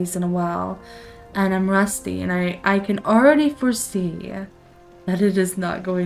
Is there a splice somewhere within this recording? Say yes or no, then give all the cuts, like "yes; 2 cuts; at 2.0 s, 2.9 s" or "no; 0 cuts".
no; 0 cuts